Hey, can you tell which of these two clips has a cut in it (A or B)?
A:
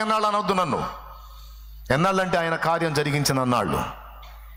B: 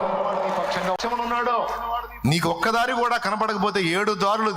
B